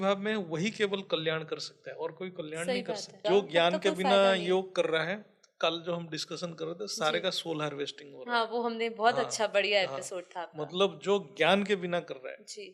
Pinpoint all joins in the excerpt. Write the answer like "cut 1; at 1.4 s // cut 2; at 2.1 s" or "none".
cut 1; at 3.1 s